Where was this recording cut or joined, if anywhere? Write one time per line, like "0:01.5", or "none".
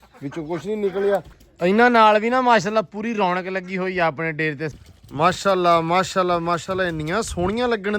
0:01.4
0:04.7